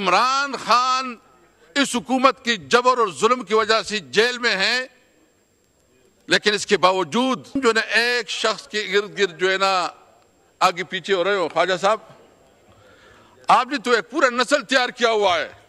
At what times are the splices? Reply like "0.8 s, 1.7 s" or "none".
7.5 s